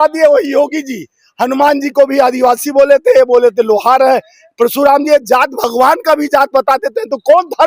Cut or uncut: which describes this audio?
uncut